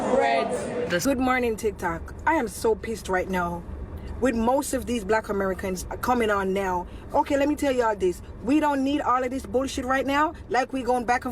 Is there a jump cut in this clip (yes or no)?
yes